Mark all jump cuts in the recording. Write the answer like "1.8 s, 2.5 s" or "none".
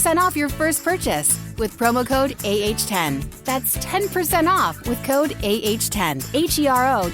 6.2 s